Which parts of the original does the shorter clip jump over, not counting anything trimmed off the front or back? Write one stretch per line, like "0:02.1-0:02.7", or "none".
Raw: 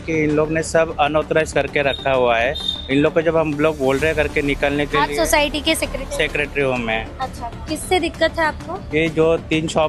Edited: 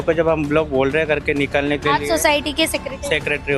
none